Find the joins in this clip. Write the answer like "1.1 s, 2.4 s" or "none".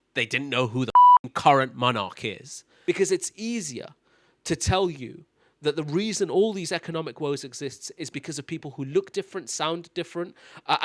2.6 s